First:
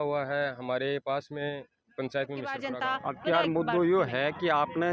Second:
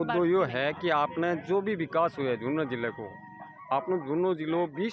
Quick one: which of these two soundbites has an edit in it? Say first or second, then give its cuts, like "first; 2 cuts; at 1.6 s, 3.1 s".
first; 1 cut; at 2.7 s